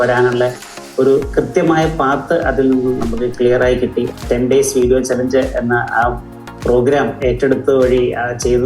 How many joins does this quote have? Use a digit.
1